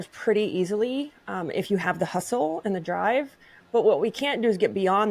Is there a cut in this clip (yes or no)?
no